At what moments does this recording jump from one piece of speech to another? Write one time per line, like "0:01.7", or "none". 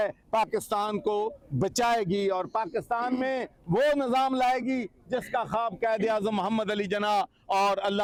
none